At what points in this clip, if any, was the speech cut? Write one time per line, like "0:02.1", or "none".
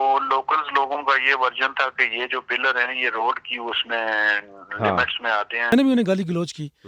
0:05.7